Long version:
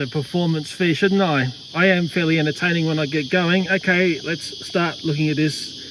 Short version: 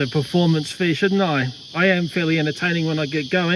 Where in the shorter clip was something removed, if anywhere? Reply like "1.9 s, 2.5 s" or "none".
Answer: none